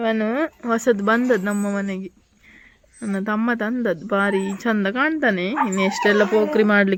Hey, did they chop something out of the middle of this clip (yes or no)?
no